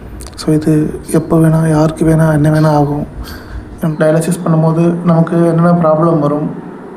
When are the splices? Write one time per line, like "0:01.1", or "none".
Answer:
0:03.9